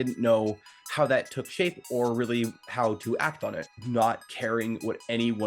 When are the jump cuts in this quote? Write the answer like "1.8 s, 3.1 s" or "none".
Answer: 3.7 s